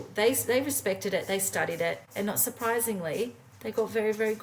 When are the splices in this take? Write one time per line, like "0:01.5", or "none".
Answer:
0:02.1